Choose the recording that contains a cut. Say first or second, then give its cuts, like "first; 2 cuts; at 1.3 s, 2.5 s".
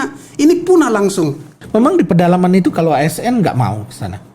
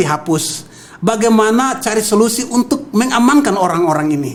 first; 1 cut; at 1.6 s